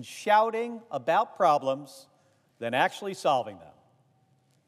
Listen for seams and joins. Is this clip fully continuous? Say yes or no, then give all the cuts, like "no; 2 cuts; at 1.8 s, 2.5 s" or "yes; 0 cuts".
no; 1 cut; at 1.3 s